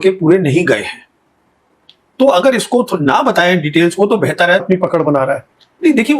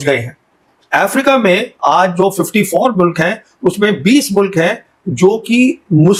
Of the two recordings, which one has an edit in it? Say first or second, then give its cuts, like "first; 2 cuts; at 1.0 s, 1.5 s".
first; 1 cut; at 4.8 s